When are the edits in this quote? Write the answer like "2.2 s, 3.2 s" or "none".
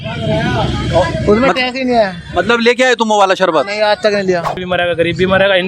4.6 s